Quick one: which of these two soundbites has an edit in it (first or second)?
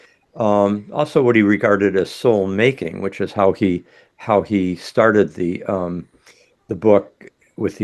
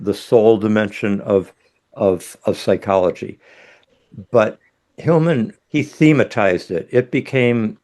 second